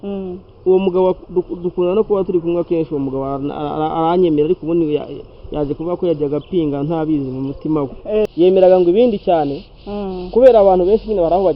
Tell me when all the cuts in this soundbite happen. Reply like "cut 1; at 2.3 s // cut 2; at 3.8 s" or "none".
cut 1; at 8.3 s